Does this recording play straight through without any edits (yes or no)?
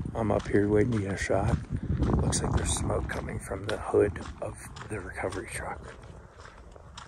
yes